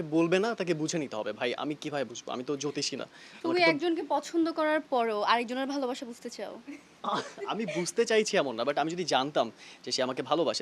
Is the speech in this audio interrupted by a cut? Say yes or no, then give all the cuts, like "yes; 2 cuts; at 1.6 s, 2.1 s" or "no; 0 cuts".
no; 0 cuts